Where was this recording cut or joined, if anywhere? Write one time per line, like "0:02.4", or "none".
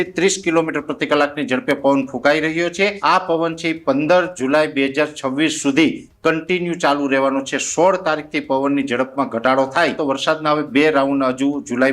0:03.0
0:10.0